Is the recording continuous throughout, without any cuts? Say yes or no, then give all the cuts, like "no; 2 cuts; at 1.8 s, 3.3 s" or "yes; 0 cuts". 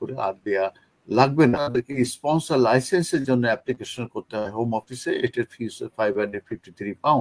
no; 1 cut; at 1.6 s